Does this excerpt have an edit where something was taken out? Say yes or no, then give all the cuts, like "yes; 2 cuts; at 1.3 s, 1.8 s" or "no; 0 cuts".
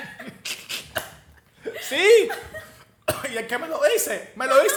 no; 0 cuts